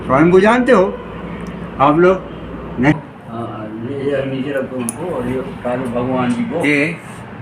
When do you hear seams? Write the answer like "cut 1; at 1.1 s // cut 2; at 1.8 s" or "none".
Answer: cut 1; at 2.9 s